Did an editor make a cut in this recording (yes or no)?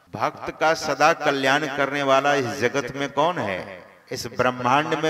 no